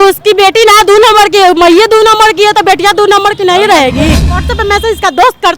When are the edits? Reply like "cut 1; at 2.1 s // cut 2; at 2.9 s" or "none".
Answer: cut 1; at 4.1 s

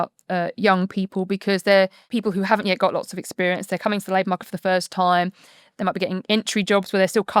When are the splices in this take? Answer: cut 1; at 2.0 s

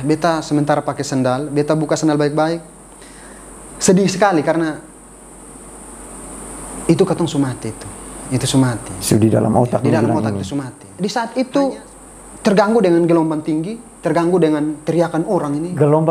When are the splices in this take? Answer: cut 1; at 10.8 s

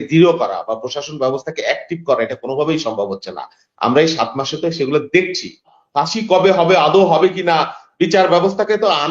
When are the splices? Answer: cut 1; at 5.7 s

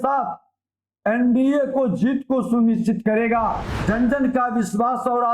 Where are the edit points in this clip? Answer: cut 1; at 3.7 s

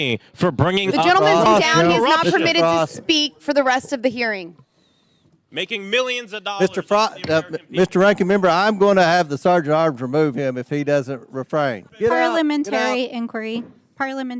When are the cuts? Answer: cut 1; at 11.9 s

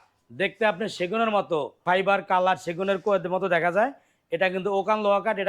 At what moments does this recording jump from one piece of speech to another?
cut 1; at 1.8 s

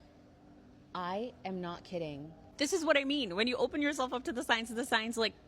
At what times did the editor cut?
cut 1; at 0.9 s // cut 2; at 2.5 s

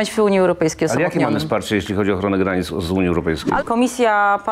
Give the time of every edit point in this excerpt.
cut 1; at 3.6 s

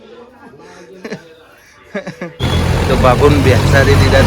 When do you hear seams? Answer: cut 1; at 2.3 s

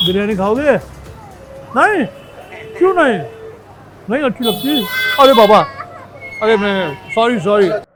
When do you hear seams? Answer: none

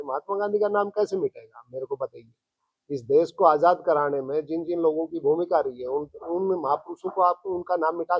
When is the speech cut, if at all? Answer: none

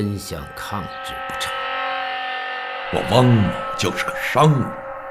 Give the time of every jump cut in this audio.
none

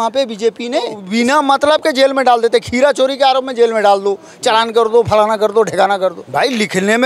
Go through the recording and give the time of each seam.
cut 1; at 1.0 s // cut 2; at 6.2 s

